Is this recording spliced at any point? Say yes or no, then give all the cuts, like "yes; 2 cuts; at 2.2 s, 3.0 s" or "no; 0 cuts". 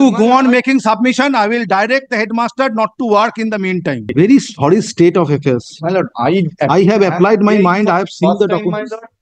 yes; 1 cut; at 4.1 s